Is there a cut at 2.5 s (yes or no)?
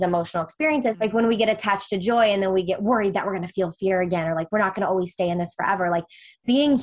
no